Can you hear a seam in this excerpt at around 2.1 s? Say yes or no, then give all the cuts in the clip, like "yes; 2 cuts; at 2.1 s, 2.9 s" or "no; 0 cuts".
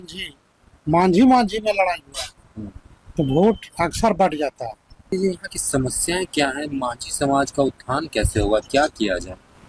no; 1 cut; at 5.1 s